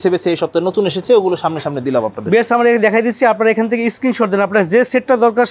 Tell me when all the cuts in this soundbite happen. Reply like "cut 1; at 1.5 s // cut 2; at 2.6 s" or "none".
none